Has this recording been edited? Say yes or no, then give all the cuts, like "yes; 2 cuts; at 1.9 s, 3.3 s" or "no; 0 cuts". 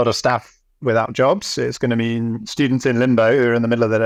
no; 0 cuts